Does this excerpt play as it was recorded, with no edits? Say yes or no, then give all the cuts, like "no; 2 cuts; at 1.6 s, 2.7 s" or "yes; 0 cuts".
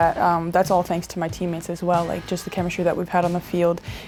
yes; 0 cuts